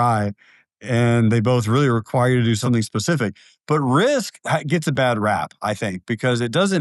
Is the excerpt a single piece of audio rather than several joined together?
no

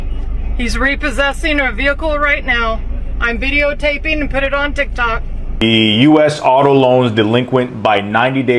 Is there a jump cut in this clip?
yes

